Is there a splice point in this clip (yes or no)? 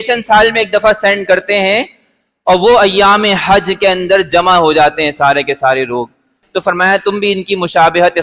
yes